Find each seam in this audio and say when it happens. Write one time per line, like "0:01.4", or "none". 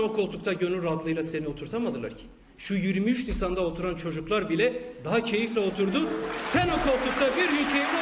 none